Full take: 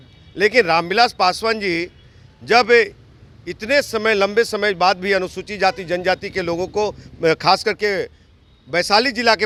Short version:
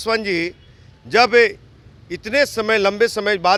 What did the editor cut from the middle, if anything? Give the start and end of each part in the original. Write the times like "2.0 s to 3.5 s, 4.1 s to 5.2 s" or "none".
none

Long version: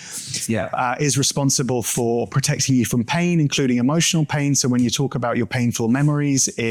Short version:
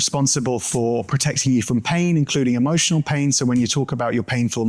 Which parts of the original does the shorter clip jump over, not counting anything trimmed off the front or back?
none

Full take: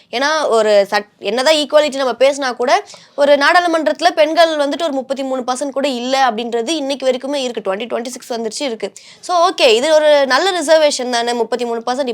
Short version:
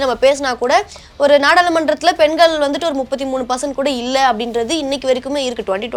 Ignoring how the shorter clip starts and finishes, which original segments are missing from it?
none

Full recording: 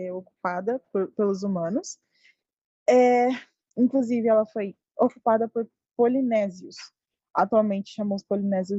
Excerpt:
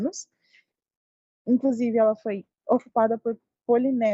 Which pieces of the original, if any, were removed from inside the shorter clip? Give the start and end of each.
2.8 s to 3.4 s

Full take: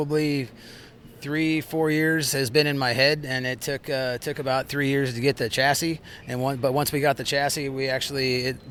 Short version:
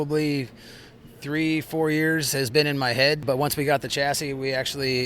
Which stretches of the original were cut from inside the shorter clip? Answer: 3.2 s to 6.6 s

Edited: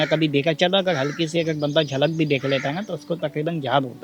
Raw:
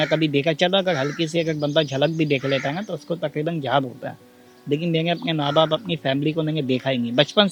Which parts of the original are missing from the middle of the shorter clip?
none

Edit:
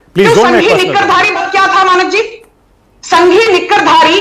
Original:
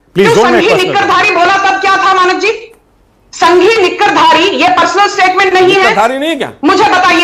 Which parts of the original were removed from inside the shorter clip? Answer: 1.3 s to 1.6 s

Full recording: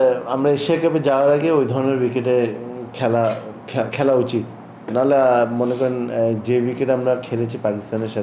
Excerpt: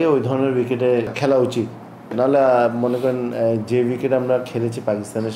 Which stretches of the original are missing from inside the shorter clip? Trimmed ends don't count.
2.6 s to 3.9 s

